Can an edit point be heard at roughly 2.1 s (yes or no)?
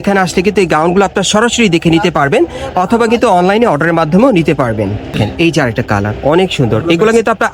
no